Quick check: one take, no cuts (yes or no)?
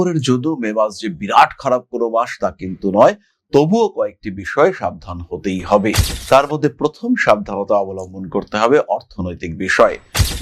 yes